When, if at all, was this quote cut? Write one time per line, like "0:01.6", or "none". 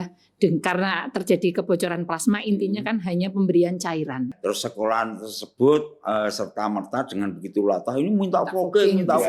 0:04.3